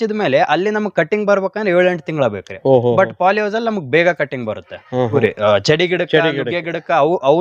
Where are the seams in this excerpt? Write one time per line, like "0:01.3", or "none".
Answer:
0:05.2